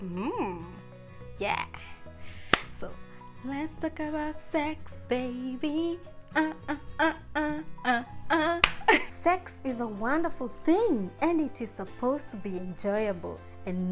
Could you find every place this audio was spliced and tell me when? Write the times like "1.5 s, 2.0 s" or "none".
9.1 s